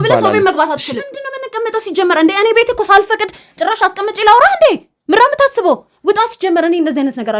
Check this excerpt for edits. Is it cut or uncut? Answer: cut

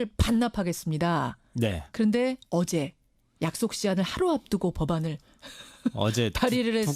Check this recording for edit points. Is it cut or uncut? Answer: cut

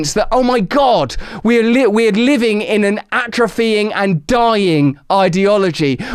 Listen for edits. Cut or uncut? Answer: uncut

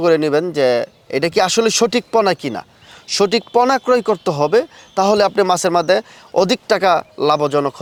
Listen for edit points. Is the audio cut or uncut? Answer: uncut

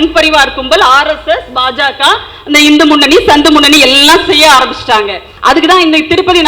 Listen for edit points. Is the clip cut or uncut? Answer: cut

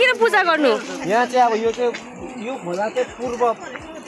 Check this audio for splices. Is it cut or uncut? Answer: uncut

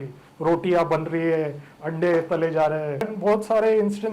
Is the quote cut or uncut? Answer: cut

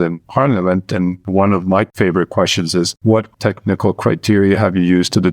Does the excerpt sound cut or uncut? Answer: cut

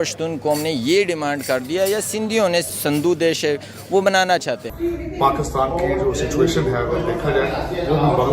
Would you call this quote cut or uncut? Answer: cut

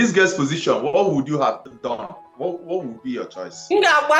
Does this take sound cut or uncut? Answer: cut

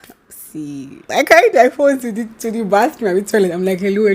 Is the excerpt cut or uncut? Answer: cut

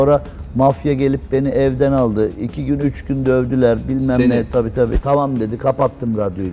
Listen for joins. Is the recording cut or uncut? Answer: cut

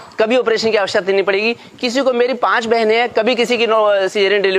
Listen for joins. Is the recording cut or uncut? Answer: uncut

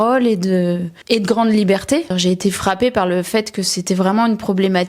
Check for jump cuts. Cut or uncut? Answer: cut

